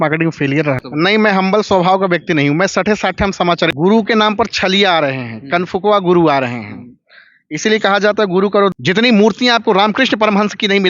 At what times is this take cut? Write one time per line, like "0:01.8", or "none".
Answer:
0:00.9
0:03.7
0:08.7